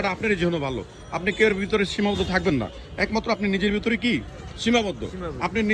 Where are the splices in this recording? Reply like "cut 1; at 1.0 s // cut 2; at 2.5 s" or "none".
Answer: none